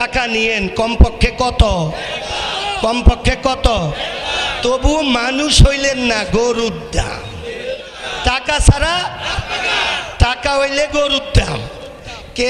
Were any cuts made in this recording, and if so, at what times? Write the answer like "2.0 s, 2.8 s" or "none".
7.9 s